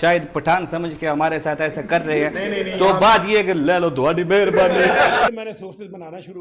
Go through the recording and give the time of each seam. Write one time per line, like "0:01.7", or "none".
0:05.3